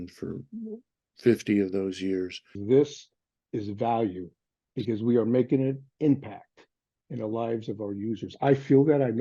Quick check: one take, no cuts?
no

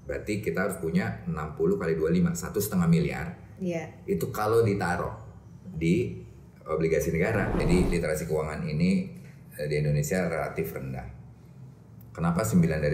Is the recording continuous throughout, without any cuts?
no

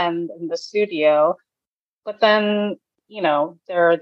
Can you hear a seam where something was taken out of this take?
no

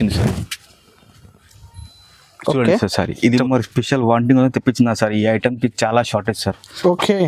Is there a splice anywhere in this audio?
yes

